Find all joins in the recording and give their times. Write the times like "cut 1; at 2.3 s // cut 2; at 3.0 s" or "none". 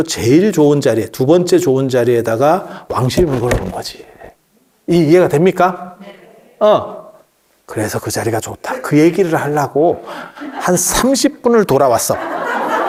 none

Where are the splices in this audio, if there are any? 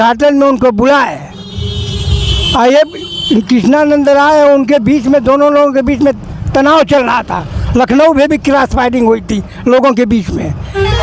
none

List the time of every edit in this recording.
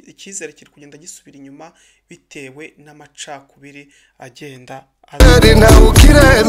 none

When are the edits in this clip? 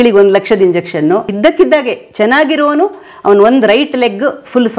cut 1; at 1.3 s

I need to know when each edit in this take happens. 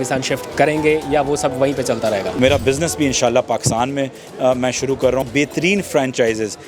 cut 1; at 2.4 s // cut 2; at 5.3 s

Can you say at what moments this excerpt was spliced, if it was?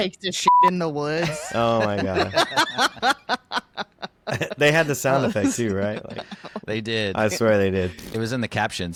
none

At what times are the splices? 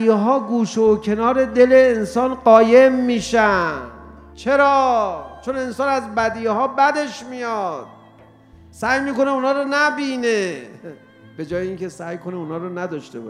cut 1; at 4.3 s

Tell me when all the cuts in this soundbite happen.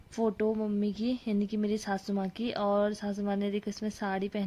none

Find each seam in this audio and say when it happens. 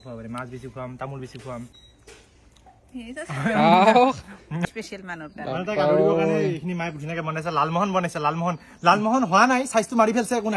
cut 1; at 1.8 s // cut 2; at 4.6 s

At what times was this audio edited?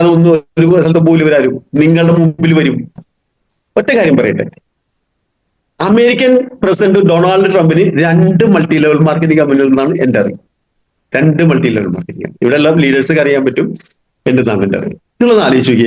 cut 1; at 3.1 s

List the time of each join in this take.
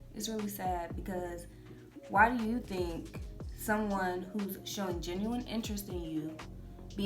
none

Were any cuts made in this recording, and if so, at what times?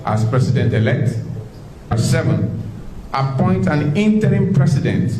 cut 1; at 1.9 s

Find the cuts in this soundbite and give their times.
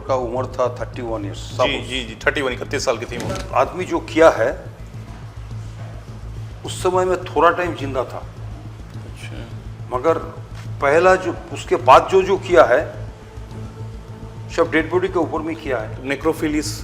cut 1; at 3.4 s

